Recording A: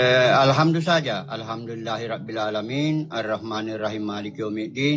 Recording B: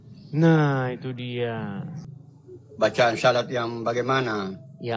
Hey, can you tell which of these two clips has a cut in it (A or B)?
B